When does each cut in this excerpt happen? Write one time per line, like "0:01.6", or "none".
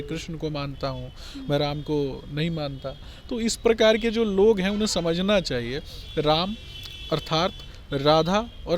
none